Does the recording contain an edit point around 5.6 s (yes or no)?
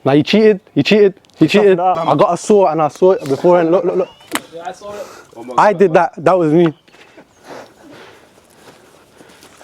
no